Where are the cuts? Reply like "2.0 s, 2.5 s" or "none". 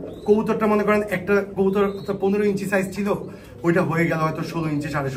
none